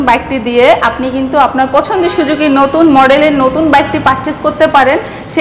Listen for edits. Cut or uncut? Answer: uncut